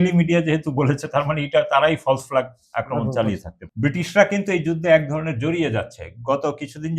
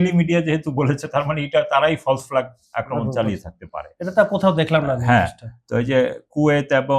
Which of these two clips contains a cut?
first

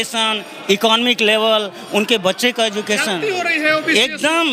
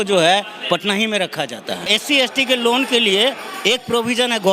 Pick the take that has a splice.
second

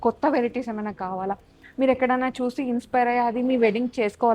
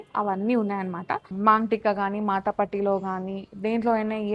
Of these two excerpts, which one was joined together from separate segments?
second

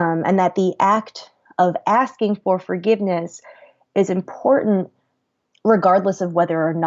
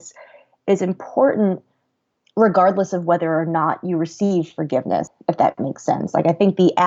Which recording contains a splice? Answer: second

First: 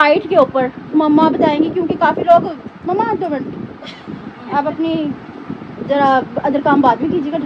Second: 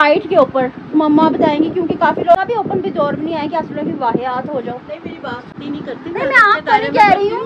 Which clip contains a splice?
second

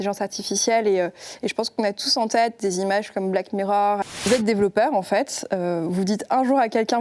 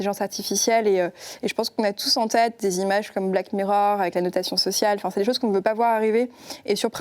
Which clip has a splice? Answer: first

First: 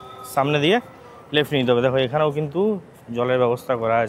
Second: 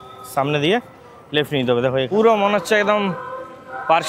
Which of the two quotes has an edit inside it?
second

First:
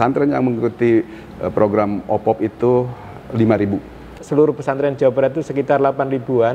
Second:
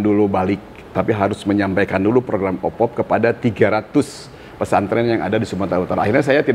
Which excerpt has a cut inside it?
first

